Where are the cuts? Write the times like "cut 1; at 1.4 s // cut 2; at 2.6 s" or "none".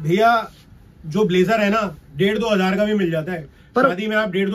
none